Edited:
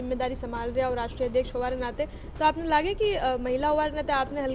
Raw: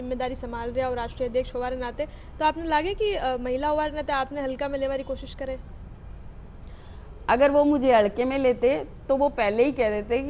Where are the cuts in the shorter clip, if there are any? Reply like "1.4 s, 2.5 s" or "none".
none